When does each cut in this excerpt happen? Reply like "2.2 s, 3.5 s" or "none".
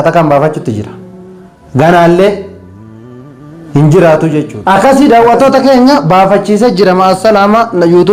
4.5 s